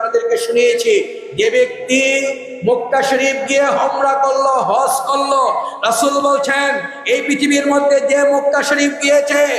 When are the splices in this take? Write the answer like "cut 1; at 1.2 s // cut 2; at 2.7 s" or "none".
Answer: none